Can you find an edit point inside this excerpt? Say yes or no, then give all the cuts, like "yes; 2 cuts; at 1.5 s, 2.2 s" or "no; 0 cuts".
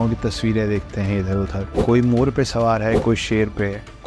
no; 0 cuts